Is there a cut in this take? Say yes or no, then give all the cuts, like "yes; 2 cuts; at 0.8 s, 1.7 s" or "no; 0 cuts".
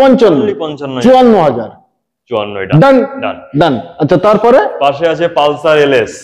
no; 0 cuts